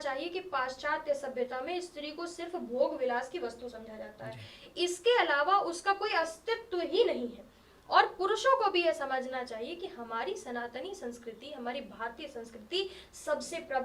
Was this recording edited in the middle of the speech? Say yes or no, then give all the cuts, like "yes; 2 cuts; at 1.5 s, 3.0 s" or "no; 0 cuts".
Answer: no; 0 cuts